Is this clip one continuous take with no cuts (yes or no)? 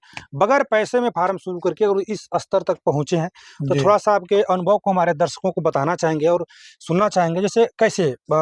yes